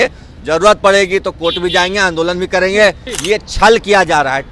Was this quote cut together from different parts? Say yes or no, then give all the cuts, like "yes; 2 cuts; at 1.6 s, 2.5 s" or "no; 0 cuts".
yes; 1 cut; at 3.1 s